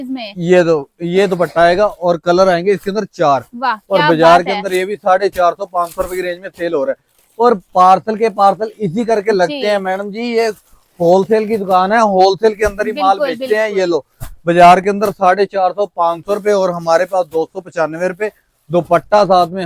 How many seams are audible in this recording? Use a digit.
0